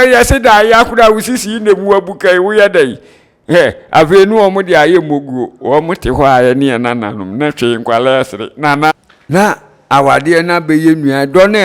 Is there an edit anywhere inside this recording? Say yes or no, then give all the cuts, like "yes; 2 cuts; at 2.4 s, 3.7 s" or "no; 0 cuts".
yes; 1 cut; at 8.9 s